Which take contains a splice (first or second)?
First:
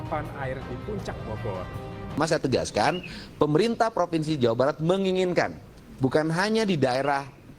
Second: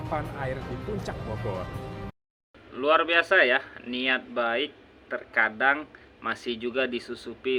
first